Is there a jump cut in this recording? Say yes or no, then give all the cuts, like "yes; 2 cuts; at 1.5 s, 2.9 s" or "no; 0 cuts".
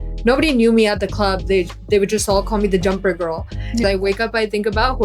yes; 1 cut; at 3.8 s